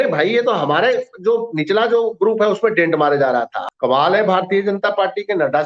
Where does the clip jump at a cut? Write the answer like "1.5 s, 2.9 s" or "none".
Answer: 3.6 s